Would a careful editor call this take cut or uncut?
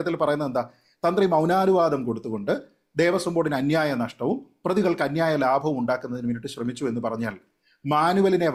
uncut